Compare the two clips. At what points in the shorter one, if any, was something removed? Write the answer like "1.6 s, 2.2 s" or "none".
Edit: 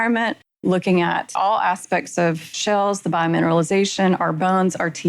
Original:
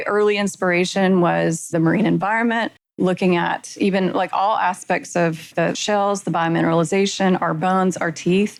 1.3 s, 2.5 s